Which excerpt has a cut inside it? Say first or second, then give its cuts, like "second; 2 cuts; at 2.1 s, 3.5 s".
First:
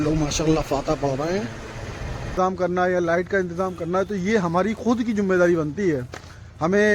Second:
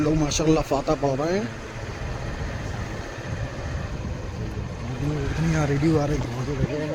first; 1 cut; at 2.3 s